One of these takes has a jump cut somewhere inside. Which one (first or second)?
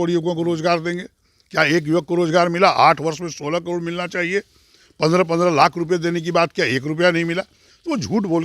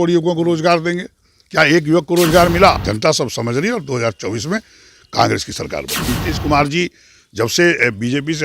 second